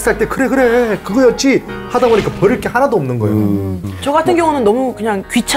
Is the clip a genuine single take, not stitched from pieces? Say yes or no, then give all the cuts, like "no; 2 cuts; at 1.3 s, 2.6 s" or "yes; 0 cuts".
no; 1 cut; at 3.8 s